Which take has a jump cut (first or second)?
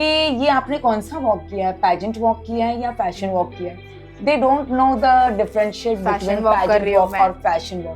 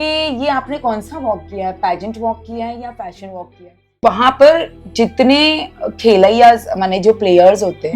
second